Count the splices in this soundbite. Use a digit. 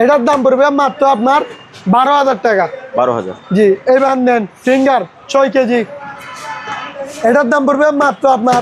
0